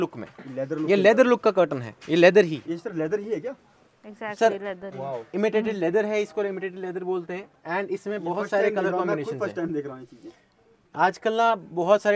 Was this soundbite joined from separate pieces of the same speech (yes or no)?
no